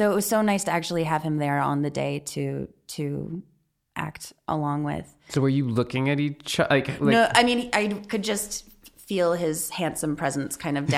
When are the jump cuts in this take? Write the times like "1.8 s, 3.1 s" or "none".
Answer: 5.2 s